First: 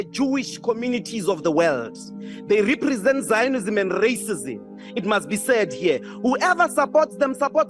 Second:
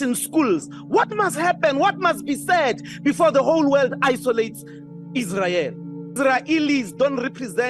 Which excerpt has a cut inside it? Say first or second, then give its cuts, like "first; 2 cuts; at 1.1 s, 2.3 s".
second; 1 cut; at 6.1 s